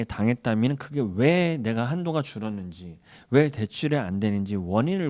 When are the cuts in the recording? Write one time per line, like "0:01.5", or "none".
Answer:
none